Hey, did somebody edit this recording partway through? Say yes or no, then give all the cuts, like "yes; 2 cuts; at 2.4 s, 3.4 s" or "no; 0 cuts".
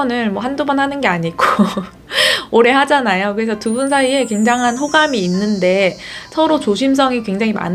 no; 0 cuts